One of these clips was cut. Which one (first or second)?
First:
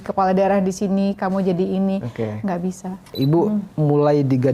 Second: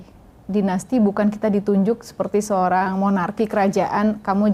first